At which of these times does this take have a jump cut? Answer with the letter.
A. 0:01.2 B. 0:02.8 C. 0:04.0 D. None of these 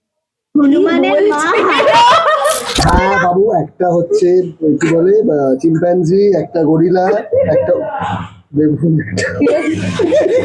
B